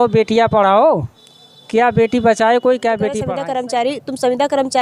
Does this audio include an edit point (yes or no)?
yes